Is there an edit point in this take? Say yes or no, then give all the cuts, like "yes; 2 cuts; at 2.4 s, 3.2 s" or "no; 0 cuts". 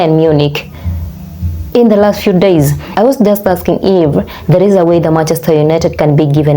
yes; 1 cut; at 2.8 s